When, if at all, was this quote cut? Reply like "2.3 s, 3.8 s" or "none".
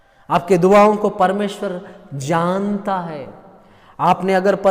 none